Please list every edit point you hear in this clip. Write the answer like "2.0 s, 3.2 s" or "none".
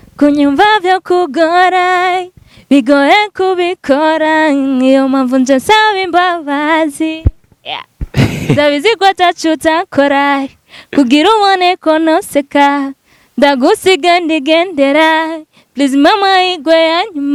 none